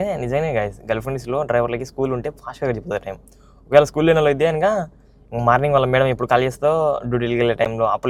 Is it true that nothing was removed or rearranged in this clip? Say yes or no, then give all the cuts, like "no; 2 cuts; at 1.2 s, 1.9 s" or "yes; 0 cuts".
yes; 0 cuts